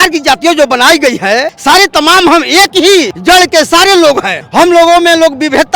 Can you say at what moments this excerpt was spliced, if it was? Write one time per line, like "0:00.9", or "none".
0:01.5
0:03.1
0:04.4